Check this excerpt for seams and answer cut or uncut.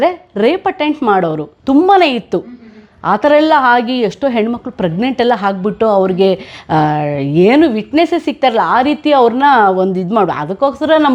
uncut